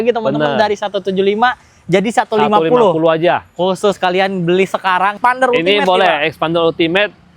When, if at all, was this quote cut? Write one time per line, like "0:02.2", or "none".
0:05.1